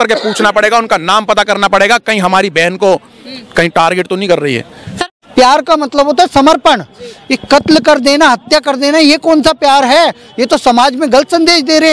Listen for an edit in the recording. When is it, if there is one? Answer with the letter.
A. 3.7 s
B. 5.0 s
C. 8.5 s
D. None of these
B